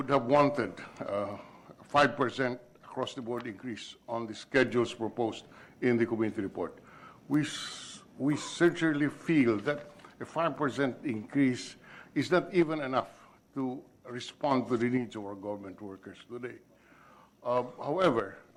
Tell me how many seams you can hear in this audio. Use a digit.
0